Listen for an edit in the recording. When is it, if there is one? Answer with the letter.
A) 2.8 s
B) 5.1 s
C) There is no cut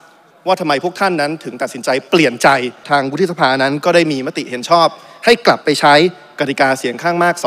A